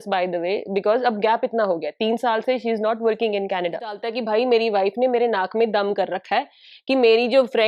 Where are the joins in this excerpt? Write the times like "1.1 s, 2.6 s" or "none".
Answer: 4.0 s